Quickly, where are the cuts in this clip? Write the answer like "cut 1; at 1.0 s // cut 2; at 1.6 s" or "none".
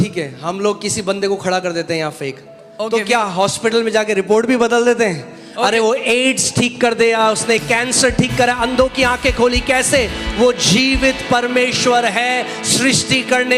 none